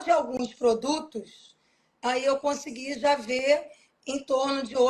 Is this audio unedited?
yes; 0 cuts

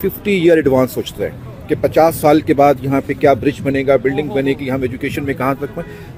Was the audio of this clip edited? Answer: no; 0 cuts

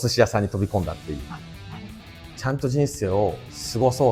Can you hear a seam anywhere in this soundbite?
yes; 1 cut; at 1.7 s

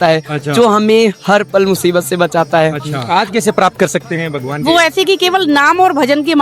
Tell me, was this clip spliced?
yes; 1 cut; at 2.9 s

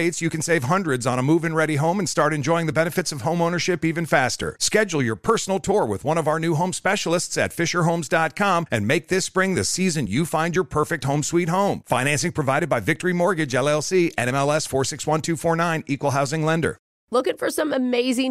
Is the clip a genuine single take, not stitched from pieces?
no; 1 cut; at 16.9 s

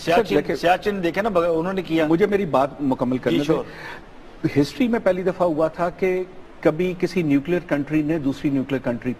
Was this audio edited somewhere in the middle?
yes; 1 cut; at 1.3 s

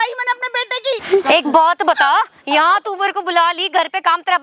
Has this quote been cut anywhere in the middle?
yes; 1 cut; at 1.0 s

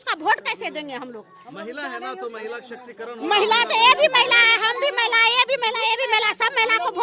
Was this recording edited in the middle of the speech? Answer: no; 0 cuts

